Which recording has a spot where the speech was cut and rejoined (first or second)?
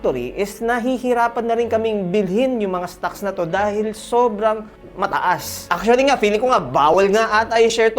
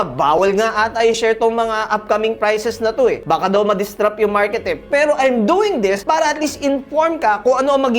first